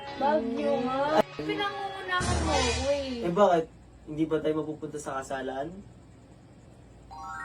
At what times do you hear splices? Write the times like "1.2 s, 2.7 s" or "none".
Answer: 1.2 s